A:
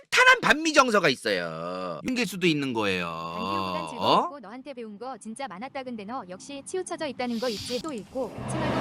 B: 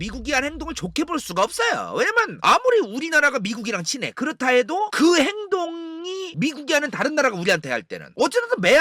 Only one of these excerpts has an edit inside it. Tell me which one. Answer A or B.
A